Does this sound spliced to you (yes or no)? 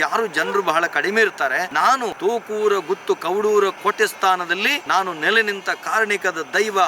yes